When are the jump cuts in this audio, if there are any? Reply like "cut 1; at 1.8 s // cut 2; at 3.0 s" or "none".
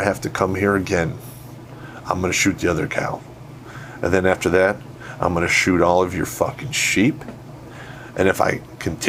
none